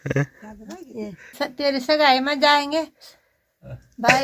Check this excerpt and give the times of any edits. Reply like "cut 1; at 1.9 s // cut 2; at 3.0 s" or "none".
cut 1; at 1.2 s